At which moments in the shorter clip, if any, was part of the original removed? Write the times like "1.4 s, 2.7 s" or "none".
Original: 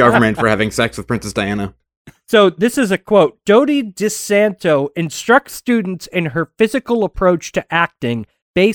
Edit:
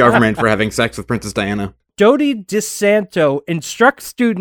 1.9 s